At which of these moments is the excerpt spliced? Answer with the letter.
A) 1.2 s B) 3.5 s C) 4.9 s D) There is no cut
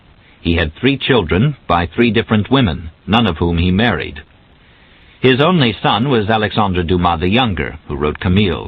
A